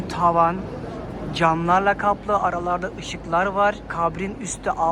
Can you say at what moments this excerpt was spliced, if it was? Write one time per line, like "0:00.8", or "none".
0:03.9